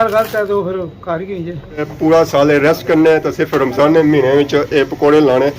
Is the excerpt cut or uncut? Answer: cut